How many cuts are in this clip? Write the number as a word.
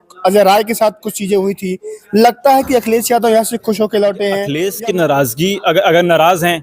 one